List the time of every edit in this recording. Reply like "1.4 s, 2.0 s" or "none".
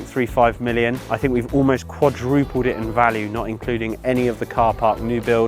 1.1 s

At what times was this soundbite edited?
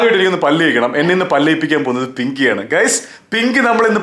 none

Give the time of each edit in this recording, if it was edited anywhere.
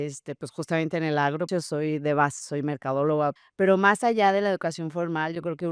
1.5 s, 3.4 s

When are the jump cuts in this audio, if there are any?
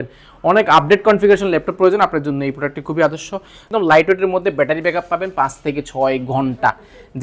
3.6 s

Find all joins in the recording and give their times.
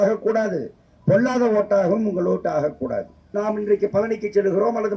3.3 s

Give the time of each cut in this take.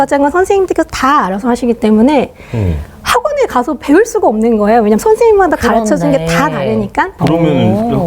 7.2 s

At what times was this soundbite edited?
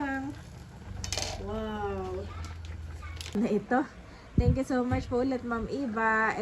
3.4 s

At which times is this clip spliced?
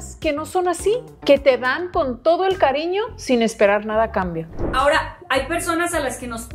4.6 s

